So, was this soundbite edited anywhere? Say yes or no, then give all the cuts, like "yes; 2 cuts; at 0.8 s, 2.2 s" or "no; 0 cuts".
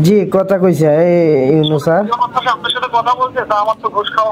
no; 0 cuts